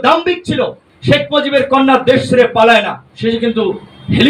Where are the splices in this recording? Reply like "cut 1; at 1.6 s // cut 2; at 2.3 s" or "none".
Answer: none